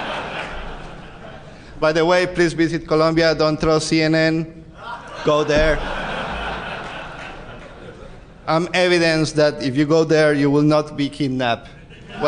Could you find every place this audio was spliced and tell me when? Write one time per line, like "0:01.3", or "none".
0:02.8